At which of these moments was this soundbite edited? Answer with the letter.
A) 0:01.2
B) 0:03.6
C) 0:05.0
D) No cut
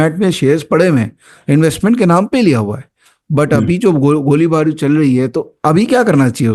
D